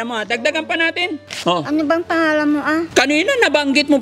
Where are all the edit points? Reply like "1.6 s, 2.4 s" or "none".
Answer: 1.3 s, 2.9 s